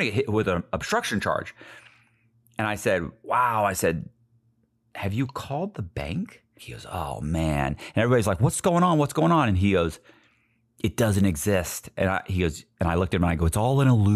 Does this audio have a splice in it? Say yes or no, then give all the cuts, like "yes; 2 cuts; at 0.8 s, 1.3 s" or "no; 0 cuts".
yes; 1 cut; at 6.6 s